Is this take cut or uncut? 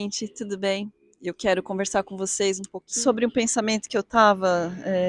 cut